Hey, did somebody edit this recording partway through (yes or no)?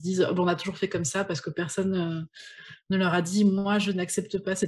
no